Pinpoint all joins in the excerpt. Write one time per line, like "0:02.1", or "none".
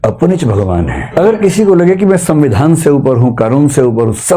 0:01.0